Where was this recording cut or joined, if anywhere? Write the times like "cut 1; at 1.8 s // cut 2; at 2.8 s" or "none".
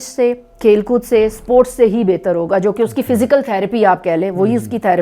none